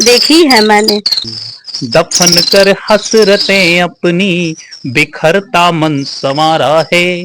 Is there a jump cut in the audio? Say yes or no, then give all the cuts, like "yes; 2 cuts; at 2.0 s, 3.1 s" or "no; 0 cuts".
yes; 1 cut; at 1.2 s